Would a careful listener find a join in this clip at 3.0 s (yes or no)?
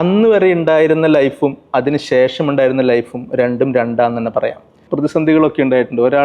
no